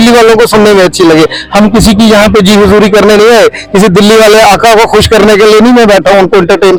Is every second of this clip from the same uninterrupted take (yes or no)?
yes